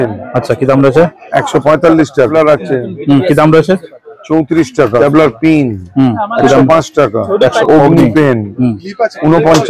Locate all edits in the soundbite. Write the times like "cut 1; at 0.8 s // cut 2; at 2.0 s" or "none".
cut 1; at 2.3 s // cut 2; at 5.0 s // cut 3; at 7.6 s